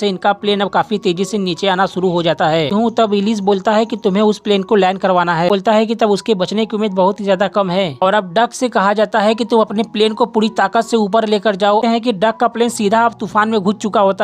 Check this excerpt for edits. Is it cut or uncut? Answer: cut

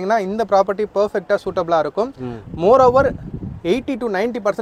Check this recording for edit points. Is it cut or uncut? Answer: uncut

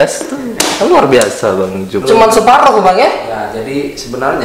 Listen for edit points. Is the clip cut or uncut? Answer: cut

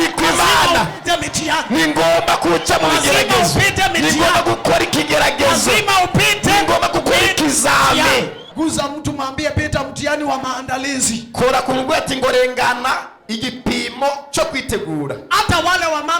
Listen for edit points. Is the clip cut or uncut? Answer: cut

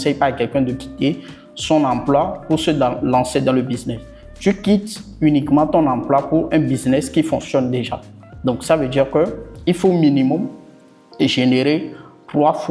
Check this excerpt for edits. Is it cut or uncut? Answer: uncut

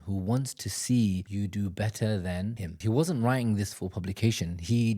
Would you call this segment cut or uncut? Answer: cut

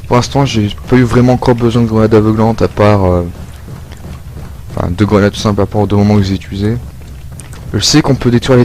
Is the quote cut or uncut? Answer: cut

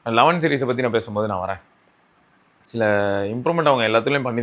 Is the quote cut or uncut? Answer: uncut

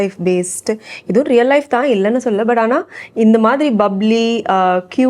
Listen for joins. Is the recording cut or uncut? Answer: uncut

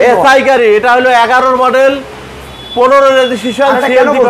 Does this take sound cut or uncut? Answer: uncut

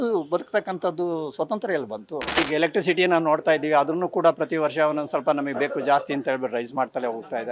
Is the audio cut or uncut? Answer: cut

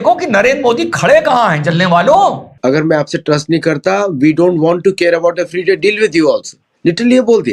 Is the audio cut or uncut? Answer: cut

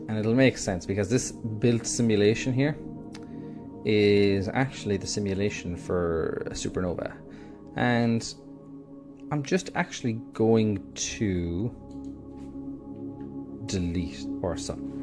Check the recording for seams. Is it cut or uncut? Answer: uncut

